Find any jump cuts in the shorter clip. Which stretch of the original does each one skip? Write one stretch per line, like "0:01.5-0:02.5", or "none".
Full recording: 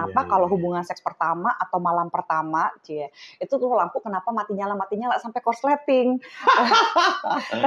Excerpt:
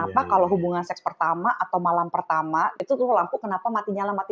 0:02.8-0:03.4